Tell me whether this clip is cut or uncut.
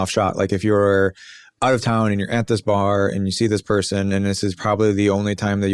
uncut